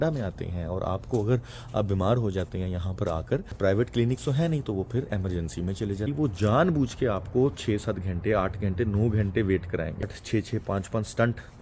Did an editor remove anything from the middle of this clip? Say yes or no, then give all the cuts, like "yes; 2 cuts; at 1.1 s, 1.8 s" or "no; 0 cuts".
yes; 3 cuts; at 3.5 s, 6.1 s, 10.1 s